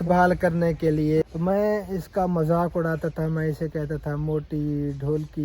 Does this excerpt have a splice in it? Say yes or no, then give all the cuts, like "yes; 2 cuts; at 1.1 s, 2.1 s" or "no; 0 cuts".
yes; 1 cut; at 1.2 s